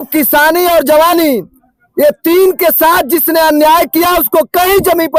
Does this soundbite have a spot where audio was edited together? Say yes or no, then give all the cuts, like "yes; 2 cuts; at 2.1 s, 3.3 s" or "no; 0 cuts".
no; 0 cuts